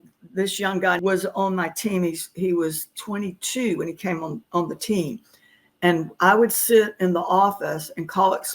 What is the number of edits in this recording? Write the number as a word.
one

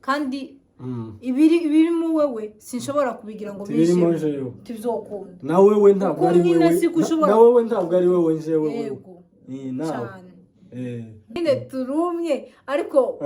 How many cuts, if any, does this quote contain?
one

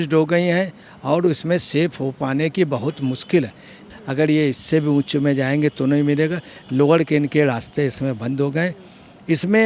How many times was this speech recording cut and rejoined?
one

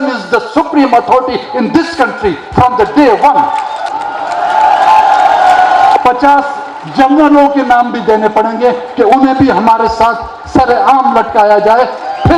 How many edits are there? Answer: two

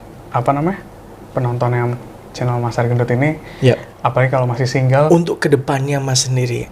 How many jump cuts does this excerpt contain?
one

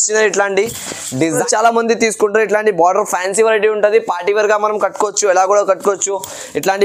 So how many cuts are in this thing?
one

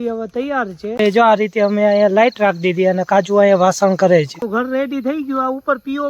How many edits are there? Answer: two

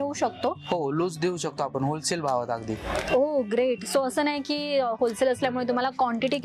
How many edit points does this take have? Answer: zero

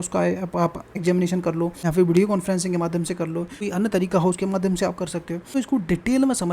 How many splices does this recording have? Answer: four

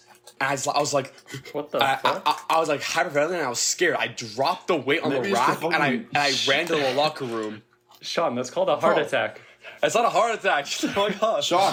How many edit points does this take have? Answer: zero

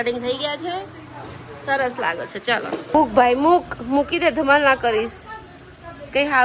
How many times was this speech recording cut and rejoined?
one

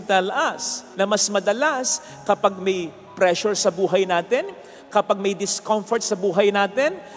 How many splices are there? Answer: zero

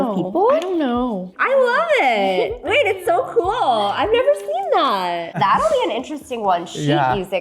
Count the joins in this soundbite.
two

